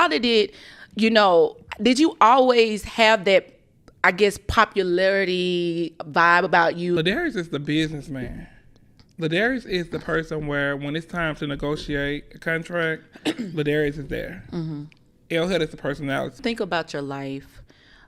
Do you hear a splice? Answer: yes; 2 cuts; at 7.0 s, 16.4 s

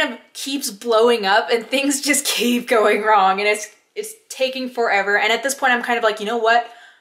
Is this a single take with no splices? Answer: yes; 0 cuts

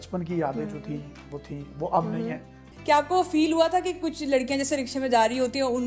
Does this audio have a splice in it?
yes; 1 cut; at 2.7 s

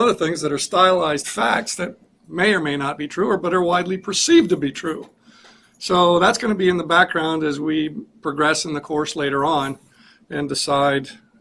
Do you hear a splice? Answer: yes; 1 cut; at 8.0 s

